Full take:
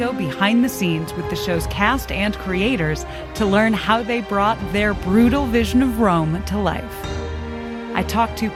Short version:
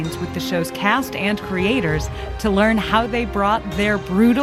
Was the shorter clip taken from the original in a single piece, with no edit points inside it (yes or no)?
yes